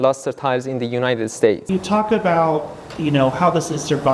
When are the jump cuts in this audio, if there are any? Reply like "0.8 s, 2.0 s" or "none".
1.6 s